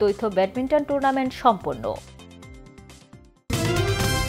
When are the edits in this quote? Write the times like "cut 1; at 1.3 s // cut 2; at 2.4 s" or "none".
cut 1; at 3.3 s